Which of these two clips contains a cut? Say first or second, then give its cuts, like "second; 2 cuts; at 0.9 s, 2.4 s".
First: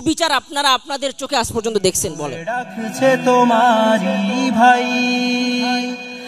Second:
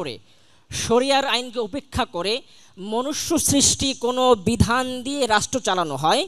first; 1 cut; at 2.4 s